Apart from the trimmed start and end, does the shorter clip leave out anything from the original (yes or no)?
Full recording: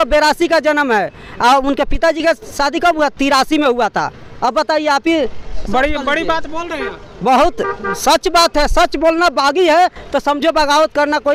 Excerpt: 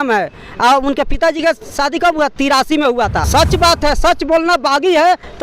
yes